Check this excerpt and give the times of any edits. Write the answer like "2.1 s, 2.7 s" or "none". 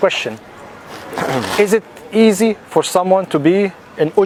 none